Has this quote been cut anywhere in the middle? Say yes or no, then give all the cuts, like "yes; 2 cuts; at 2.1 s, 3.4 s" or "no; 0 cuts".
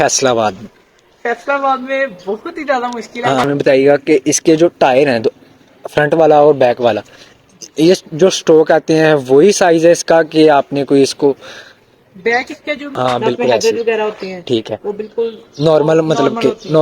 yes; 2 cuts; at 3.4 s, 12.9 s